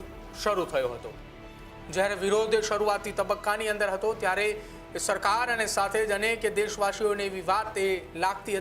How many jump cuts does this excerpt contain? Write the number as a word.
zero